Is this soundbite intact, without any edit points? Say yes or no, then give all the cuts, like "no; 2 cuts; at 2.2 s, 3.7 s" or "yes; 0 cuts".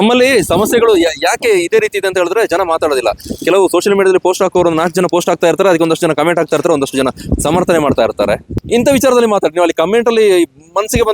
no; 1 cut; at 8.5 s